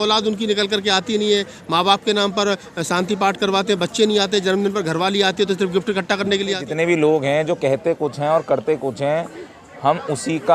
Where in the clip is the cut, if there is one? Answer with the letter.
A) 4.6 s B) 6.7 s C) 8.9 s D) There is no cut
B